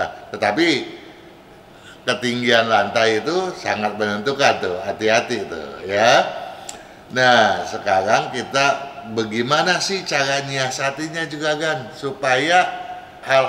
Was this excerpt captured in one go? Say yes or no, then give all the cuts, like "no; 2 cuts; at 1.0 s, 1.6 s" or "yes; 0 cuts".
yes; 0 cuts